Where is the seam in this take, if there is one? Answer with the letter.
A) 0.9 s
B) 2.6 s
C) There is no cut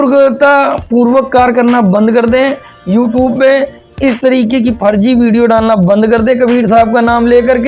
C